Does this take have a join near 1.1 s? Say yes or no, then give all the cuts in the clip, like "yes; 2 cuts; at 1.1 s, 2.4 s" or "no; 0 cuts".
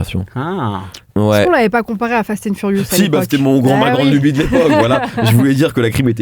yes; 1 cut; at 1.1 s